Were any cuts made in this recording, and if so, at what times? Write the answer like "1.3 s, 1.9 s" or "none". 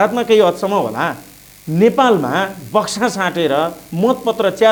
none